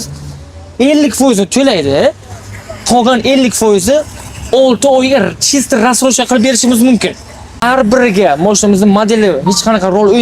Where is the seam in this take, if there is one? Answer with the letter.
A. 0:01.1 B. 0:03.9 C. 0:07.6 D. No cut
C